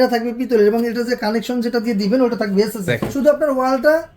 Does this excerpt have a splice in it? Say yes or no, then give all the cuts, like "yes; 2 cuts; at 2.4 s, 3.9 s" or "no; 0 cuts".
yes; 1 cut; at 3.1 s